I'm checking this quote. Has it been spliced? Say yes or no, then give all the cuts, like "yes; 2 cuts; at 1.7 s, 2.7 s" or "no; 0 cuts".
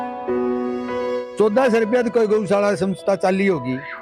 yes; 1 cut; at 1.0 s